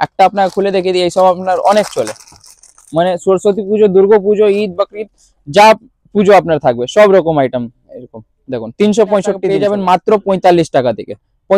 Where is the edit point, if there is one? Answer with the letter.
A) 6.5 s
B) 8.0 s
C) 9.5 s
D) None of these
C